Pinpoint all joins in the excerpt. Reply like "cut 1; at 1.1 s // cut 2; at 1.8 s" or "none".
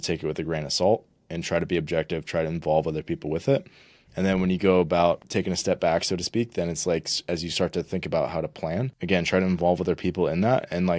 cut 1; at 5.2 s // cut 2; at 9.0 s